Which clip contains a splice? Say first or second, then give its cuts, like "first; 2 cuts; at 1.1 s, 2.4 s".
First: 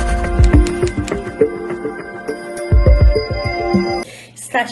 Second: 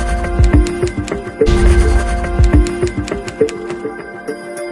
second; 1 cut; at 1.5 s